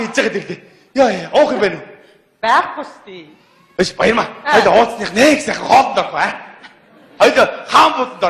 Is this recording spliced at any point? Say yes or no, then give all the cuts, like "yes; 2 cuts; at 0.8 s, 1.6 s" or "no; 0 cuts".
yes; 1 cut; at 5.1 s